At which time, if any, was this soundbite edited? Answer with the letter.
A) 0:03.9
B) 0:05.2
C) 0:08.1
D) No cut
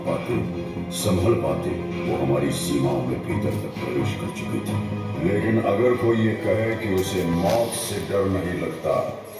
B